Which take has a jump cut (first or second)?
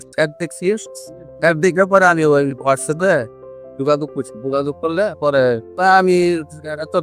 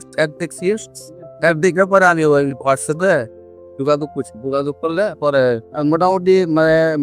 second